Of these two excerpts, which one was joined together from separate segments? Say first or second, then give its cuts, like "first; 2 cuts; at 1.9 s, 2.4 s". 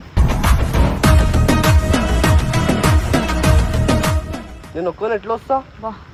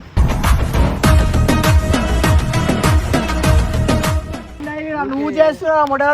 second; 1 cut; at 4.6 s